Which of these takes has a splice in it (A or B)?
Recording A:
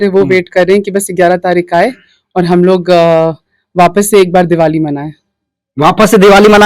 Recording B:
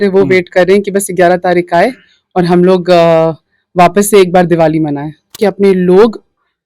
B